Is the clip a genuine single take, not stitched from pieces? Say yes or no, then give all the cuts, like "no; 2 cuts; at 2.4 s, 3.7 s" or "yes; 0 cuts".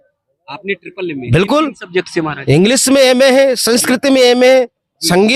yes; 0 cuts